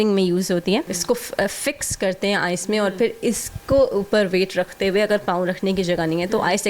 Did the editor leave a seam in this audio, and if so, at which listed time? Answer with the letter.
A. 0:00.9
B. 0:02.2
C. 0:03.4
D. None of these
A